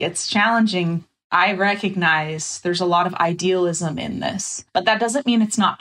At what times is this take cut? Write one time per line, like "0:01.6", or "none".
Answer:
0:01.0
0:04.7